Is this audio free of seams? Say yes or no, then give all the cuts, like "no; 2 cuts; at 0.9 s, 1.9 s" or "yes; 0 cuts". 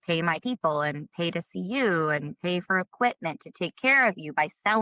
yes; 0 cuts